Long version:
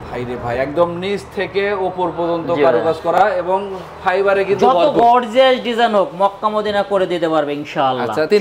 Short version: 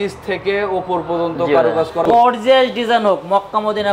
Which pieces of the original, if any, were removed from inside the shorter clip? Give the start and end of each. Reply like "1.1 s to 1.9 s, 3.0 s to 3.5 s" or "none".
3.1 s to 4.9 s

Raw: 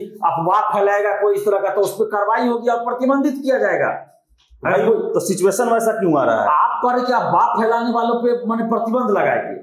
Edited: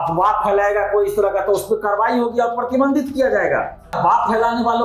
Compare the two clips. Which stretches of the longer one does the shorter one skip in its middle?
4.3 s to 7.3 s

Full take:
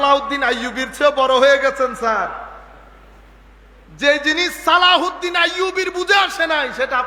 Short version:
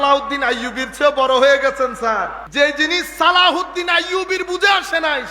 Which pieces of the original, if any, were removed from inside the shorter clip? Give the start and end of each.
2.4 s to 3.8 s

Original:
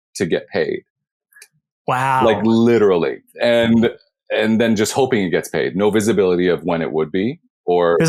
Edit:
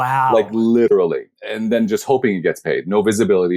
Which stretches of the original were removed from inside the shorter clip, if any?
3.2 s to 4.2 s

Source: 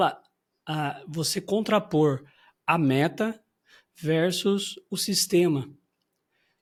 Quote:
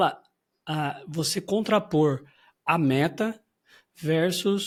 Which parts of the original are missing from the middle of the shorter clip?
none

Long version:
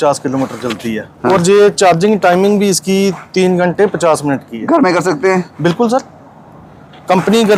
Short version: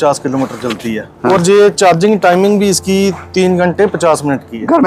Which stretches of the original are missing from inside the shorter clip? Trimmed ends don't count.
none

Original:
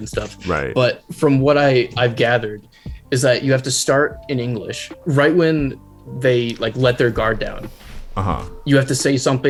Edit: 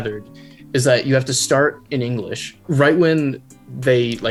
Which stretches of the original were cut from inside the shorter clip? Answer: none

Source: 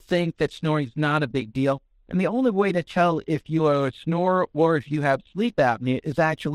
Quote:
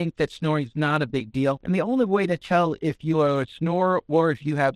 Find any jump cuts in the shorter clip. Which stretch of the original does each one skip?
1.8 s to 2.1 s

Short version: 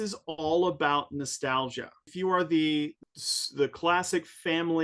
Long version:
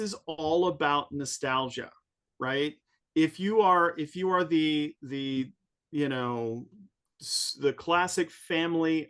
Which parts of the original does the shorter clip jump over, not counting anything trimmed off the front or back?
2.1 s to 4.1 s, 5.0 s to 7.1 s

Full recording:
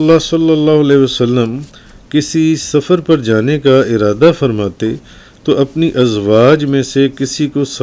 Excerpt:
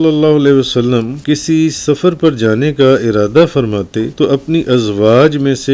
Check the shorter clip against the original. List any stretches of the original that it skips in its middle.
1.6 s to 2.0 s, 5.0 s to 5.4 s

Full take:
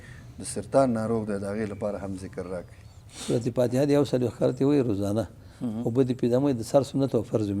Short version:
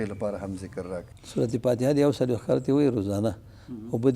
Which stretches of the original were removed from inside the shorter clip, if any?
2.8 s to 3.1 s

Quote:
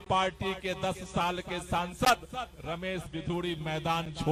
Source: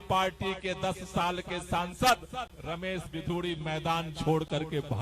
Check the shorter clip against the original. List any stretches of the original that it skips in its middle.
none

